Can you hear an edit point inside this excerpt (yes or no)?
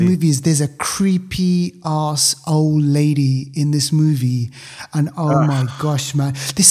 no